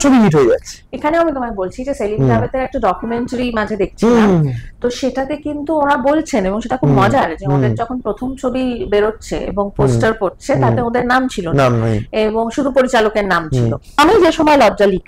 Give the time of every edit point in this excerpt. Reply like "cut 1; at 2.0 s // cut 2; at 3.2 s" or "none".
cut 1; at 13.8 s